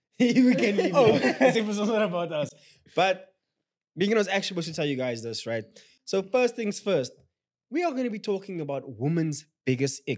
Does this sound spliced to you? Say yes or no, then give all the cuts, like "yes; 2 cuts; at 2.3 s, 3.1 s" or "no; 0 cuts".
no; 0 cuts